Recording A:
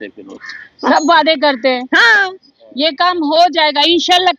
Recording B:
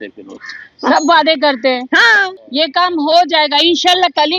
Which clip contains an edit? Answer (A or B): B